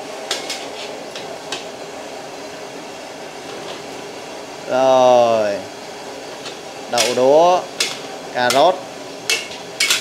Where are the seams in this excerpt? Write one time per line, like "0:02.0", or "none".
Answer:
none